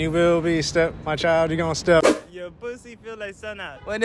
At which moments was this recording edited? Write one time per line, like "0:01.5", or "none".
0:02.0